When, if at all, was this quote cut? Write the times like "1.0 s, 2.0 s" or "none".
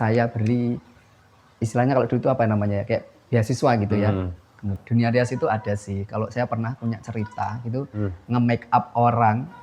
4.7 s